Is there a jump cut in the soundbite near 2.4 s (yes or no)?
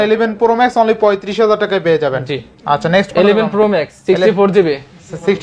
no